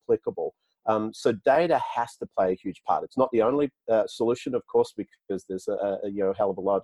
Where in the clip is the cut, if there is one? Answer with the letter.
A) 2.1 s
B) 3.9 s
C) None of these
C